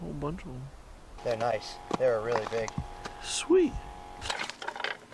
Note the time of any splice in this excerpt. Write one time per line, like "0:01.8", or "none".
0:01.1